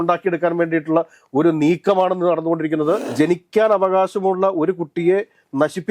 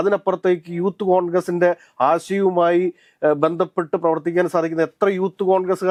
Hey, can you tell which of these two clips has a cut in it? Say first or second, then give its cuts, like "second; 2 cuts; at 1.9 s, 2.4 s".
first; 1 cut; at 3.1 s